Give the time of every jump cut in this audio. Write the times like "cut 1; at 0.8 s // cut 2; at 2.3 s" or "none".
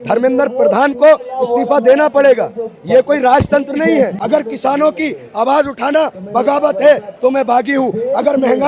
cut 1; at 4.2 s